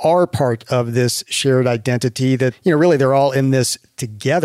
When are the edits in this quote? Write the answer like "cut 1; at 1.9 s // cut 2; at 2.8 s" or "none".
cut 1; at 2.6 s